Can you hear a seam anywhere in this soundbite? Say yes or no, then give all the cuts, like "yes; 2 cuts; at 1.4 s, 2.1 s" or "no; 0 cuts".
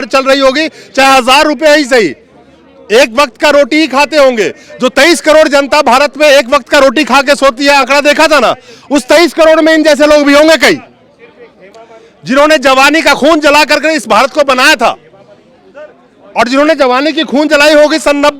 no; 0 cuts